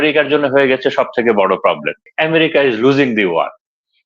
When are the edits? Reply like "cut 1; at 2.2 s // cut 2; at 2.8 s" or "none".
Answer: cut 1; at 2.1 s